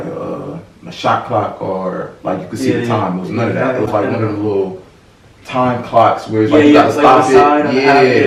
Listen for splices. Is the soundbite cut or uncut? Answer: uncut